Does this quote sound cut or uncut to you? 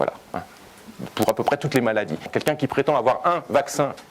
cut